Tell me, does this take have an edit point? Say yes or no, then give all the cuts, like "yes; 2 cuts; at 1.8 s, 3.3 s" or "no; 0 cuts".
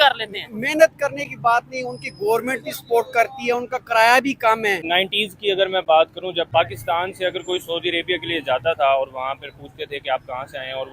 yes; 2 cuts; at 4.8 s, 6.5 s